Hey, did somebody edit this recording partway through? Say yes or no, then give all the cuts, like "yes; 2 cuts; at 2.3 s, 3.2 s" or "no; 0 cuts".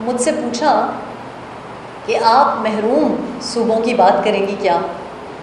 no; 0 cuts